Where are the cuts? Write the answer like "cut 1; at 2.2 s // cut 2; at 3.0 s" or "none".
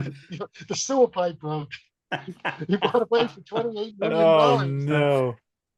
none